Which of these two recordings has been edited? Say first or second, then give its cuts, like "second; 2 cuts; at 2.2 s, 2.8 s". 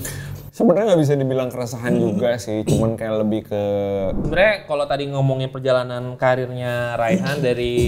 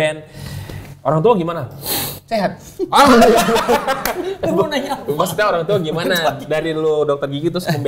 first; 1 cut; at 4.2 s